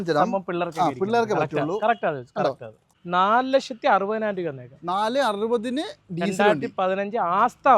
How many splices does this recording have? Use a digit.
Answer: 1